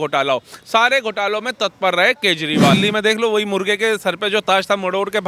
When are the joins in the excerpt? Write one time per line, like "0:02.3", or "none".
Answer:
0:02.8

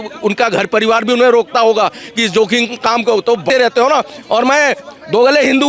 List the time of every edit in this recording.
0:03.5

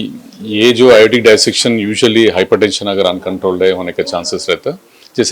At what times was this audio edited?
none

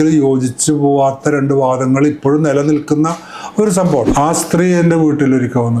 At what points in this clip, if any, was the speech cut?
0:04.1

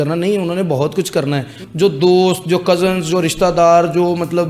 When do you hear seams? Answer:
0:01.6

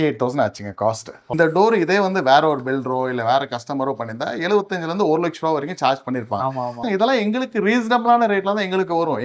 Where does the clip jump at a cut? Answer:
0:01.3

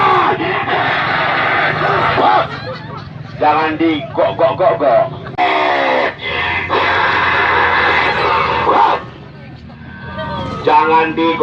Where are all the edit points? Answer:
0:05.4

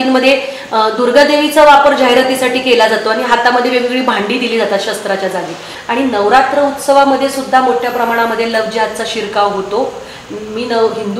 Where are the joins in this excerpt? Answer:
0:05.7

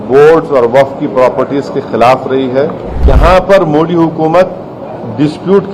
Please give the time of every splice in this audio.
0:03.0

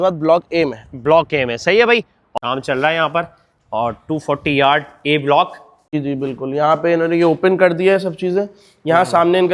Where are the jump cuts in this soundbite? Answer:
0:02.2
0:05.9

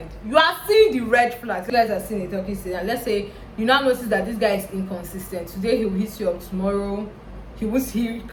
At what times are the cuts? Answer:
none

